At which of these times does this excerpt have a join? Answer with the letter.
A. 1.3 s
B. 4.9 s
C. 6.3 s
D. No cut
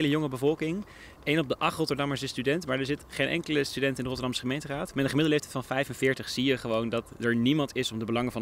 D